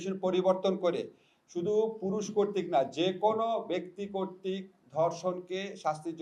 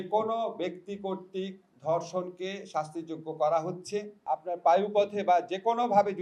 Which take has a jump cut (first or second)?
second